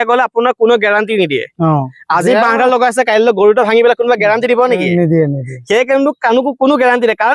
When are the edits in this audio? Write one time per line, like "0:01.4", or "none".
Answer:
none